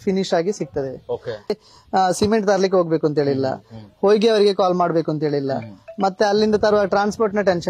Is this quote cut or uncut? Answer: cut